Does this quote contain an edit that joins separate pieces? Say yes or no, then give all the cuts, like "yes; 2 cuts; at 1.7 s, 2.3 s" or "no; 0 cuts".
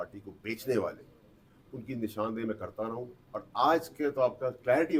no; 0 cuts